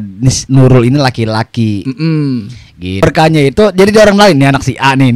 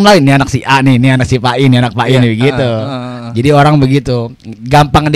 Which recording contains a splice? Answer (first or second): first